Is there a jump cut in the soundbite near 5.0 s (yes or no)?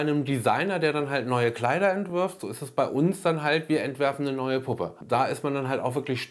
yes